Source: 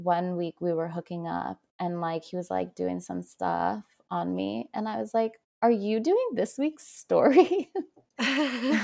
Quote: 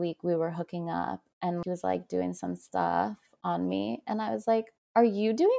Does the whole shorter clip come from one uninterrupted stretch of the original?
no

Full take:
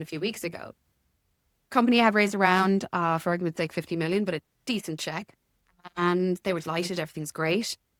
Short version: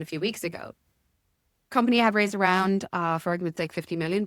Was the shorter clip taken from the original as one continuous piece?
yes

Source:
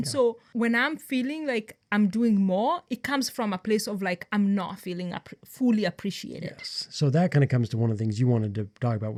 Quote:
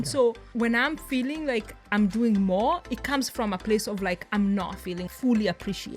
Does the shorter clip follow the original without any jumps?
no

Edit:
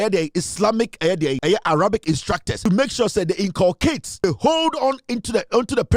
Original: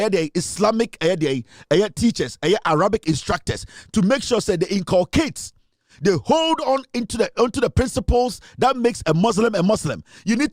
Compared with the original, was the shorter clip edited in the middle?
yes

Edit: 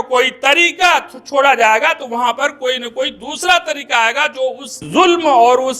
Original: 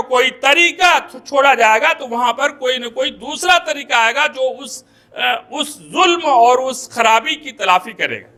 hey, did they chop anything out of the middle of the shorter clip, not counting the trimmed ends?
yes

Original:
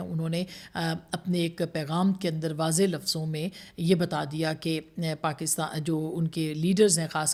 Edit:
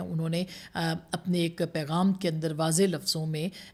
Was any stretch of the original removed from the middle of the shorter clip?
no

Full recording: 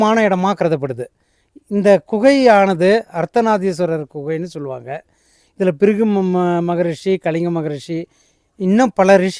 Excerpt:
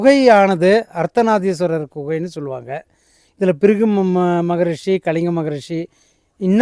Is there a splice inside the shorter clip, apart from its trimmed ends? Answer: no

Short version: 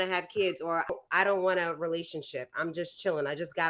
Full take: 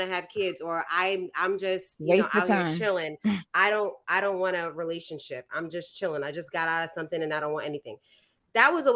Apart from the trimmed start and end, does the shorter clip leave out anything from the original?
yes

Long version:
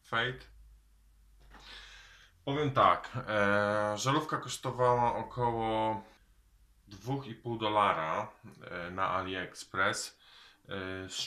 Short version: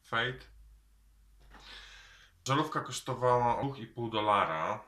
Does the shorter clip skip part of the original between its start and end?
yes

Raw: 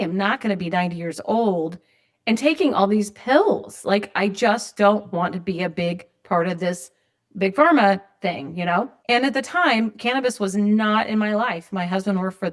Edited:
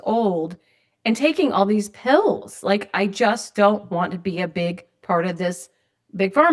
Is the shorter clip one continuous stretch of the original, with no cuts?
yes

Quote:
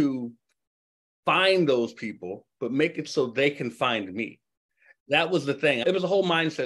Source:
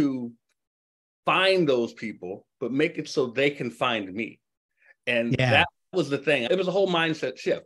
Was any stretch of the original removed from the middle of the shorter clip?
yes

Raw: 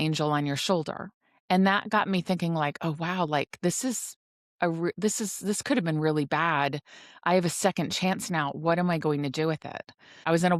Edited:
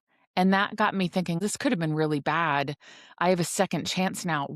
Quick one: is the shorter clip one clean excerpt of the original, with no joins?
no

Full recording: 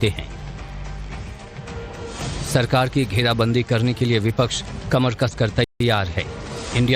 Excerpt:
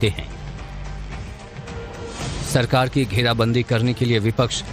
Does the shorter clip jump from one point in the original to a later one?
no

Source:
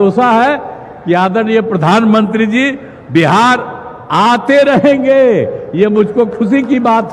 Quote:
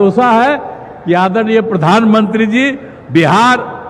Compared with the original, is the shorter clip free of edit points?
yes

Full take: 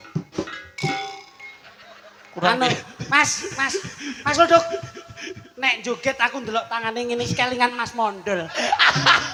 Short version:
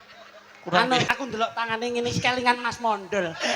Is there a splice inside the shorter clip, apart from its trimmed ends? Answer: yes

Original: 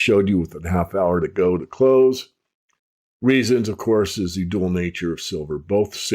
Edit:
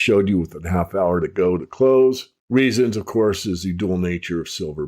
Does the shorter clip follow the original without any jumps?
no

